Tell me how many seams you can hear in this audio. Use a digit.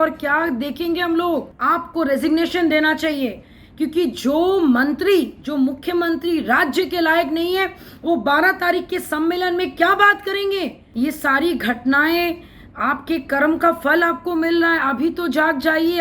2